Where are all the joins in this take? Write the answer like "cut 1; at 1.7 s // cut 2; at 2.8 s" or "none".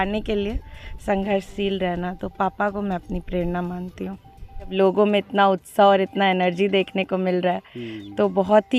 cut 1; at 4.7 s